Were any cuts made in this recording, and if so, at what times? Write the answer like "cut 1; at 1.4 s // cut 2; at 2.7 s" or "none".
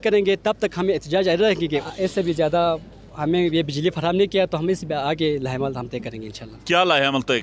cut 1; at 1.8 s